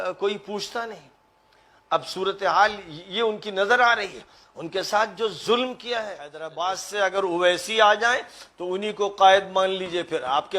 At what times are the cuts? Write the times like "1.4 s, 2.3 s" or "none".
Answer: 6.5 s